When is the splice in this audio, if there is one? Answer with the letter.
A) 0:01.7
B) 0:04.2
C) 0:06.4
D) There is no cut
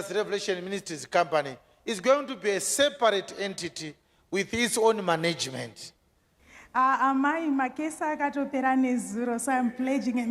C